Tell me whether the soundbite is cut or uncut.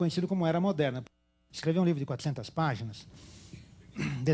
cut